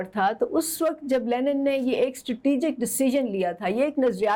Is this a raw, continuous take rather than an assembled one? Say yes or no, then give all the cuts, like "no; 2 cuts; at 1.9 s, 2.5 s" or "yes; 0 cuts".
yes; 0 cuts